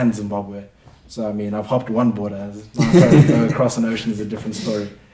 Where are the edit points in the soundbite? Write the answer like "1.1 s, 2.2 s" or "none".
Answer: none

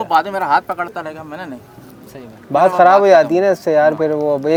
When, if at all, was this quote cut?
none

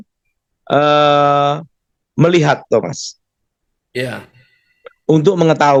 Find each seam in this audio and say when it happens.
none

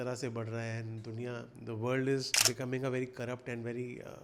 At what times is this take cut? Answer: 2.3 s

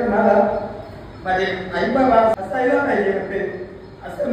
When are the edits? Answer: 2.4 s

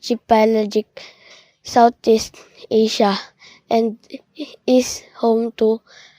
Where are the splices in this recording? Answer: 1.0 s

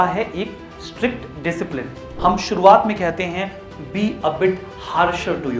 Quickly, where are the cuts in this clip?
2.0 s

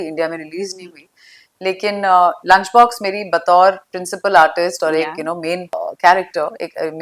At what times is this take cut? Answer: 5.8 s

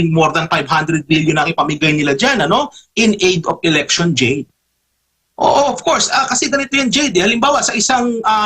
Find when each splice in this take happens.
4.5 s

